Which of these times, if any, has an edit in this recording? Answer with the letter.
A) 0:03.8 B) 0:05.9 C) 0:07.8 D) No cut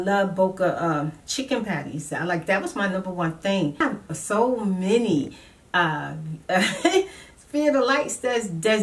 A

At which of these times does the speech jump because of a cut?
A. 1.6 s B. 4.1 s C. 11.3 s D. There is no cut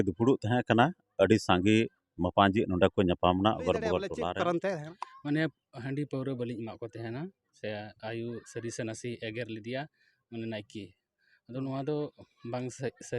B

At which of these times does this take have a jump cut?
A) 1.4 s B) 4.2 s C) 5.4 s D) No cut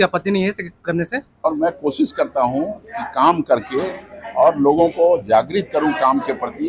A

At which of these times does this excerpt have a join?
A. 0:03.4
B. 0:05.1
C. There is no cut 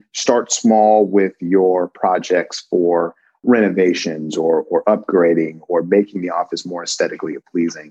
A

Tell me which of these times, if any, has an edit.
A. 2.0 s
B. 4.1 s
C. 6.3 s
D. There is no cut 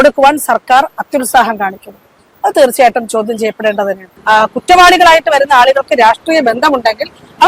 B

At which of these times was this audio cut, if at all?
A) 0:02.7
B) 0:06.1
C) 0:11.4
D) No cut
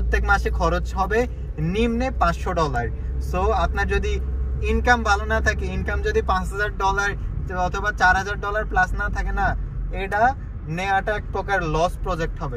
D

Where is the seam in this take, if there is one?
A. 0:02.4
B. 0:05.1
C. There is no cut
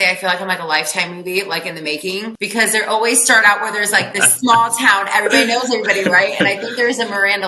A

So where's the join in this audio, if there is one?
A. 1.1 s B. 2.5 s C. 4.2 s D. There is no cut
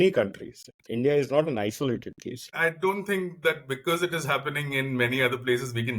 B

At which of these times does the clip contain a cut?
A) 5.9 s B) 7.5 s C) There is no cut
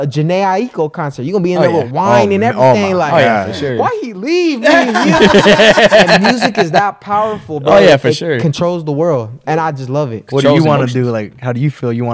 C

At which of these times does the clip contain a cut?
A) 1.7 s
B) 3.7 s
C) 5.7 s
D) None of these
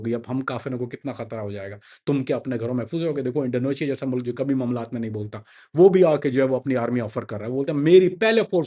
D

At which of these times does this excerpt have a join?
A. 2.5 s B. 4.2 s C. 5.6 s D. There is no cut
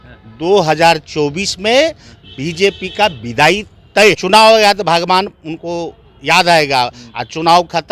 B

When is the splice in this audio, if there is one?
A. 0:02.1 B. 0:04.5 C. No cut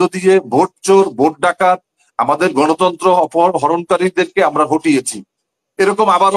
C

